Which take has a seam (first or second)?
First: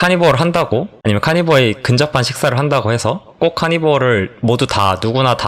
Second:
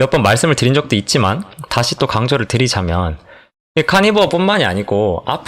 first